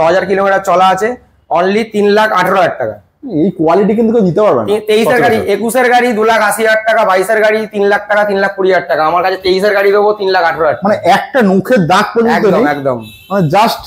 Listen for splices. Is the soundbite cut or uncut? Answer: uncut